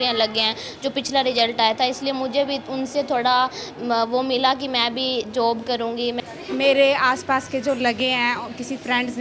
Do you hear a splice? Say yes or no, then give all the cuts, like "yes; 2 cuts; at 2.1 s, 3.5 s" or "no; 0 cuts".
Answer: yes; 1 cut; at 6.2 s